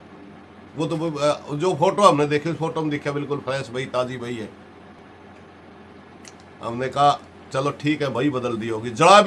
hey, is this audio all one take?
yes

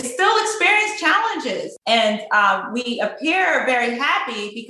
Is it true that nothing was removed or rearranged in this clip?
no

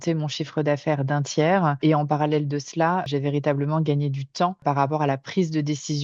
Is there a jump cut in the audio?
yes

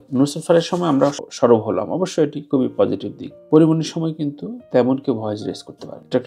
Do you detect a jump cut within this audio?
yes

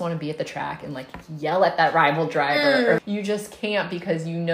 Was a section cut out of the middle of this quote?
yes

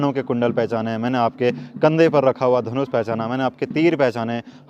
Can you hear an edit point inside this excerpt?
no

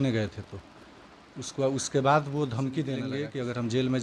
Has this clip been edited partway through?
yes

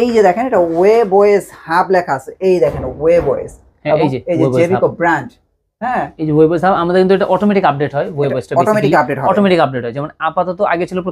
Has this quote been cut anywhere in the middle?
no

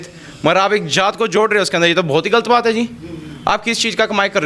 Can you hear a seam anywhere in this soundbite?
no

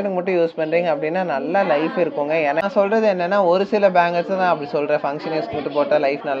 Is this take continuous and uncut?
yes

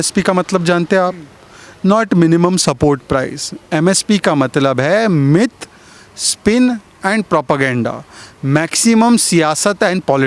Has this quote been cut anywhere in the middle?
no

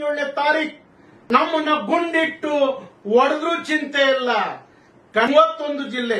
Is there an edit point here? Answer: yes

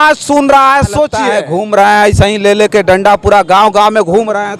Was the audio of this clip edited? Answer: yes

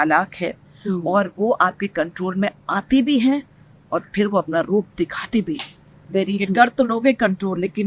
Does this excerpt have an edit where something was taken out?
no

